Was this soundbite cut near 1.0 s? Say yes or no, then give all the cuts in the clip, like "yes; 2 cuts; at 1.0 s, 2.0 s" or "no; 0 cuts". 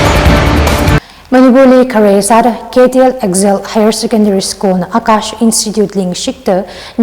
yes; 1 cut; at 1.0 s